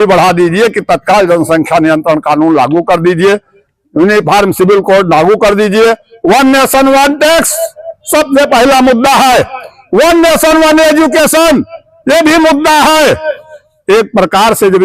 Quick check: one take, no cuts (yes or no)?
yes